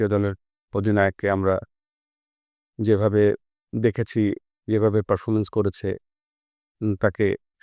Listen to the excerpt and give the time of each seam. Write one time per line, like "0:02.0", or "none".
none